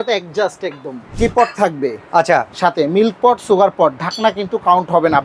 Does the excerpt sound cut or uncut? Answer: cut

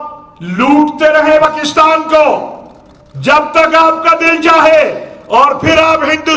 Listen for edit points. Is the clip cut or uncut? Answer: cut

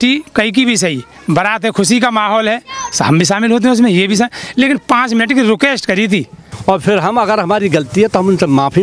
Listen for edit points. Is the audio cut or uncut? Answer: cut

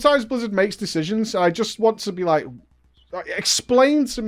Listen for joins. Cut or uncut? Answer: uncut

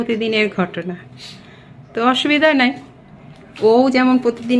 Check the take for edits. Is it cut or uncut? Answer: uncut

